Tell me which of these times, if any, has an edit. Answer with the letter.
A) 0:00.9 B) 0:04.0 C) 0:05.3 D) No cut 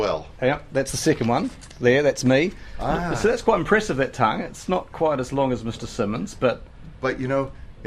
A